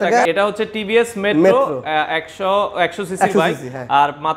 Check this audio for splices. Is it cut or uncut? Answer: uncut